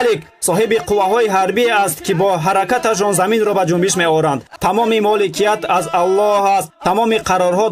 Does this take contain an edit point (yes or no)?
yes